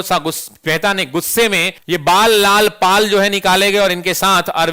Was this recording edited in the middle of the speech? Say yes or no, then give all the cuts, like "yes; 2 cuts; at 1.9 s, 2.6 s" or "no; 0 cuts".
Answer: yes; 1 cut; at 1.8 s